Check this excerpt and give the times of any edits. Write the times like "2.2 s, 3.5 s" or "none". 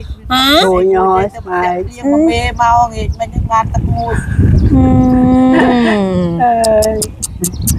none